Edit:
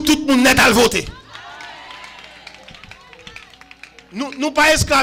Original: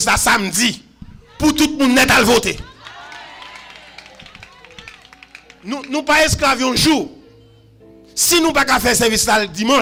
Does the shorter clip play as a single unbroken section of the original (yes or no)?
yes